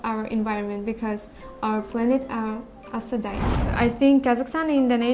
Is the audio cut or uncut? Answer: cut